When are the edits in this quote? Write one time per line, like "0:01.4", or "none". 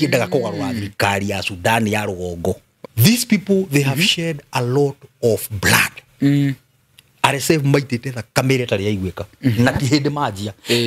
0:02.7